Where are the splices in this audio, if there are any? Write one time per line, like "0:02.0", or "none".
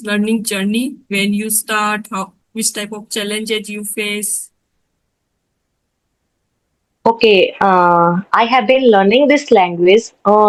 none